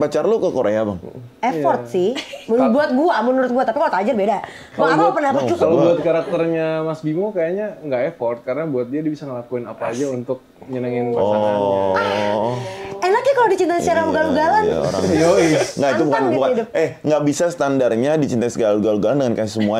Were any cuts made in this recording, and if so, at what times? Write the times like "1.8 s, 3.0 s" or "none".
none